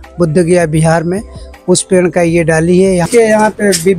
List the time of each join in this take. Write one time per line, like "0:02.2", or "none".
0:03.1